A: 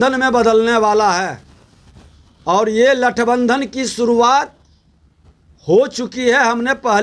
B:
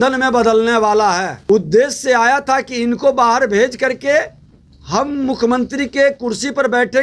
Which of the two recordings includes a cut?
B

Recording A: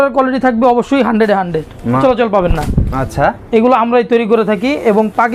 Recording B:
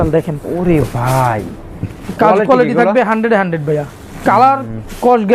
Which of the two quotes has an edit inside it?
A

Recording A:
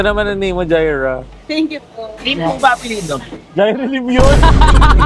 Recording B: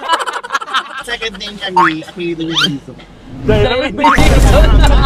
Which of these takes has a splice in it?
B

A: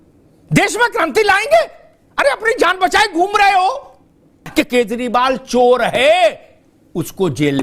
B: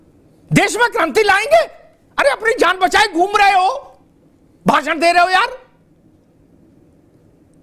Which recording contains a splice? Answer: A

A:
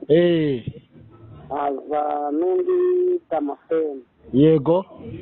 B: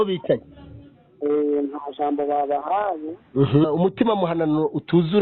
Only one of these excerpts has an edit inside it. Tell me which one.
B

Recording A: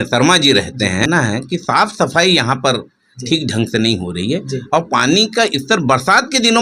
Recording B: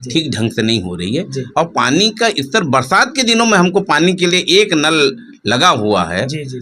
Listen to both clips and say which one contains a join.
A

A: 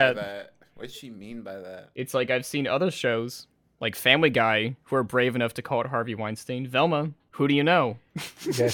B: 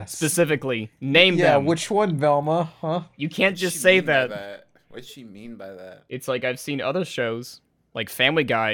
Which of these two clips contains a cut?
A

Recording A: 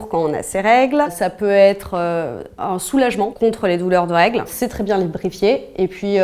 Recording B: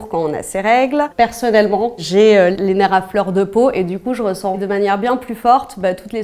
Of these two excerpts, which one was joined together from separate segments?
B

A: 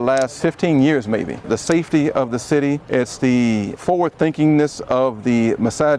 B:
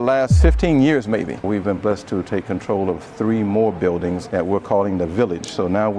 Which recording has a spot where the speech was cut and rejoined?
B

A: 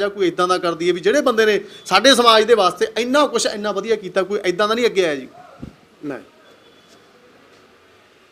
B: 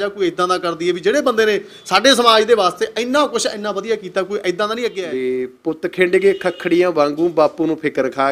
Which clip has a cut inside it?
B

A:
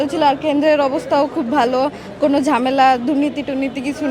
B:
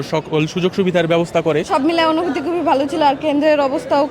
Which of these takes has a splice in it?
B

